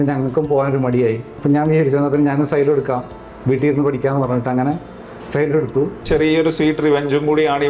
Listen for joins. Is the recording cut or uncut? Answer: cut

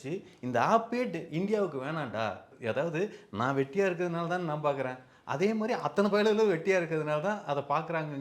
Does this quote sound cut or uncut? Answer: cut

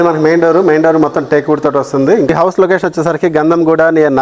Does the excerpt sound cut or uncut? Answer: cut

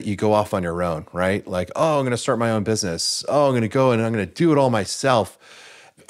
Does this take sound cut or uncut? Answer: uncut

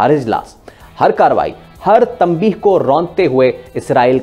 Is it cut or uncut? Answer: uncut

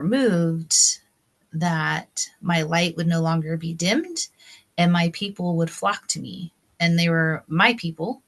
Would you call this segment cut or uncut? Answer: uncut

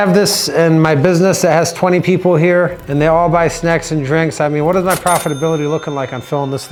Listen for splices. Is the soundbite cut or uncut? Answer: uncut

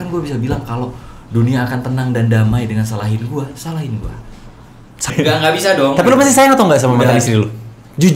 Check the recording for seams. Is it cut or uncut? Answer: cut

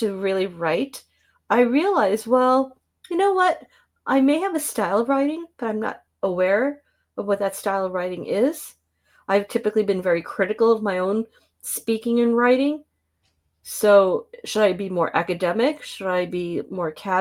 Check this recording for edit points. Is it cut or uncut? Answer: uncut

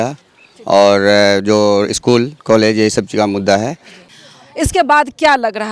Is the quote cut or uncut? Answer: cut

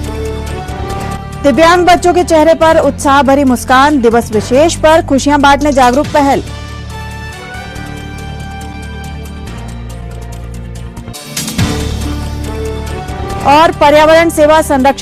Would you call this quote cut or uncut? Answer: uncut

